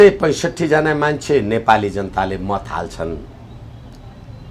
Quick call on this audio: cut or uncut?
uncut